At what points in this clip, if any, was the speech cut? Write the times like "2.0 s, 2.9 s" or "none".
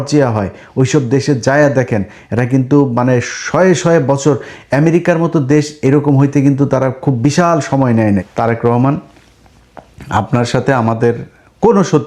8.3 s